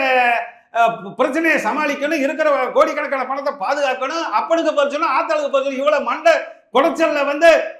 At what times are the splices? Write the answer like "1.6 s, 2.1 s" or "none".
none